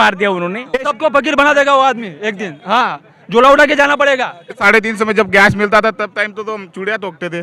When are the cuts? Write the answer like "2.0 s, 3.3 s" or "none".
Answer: 0.9 s, 4.5 s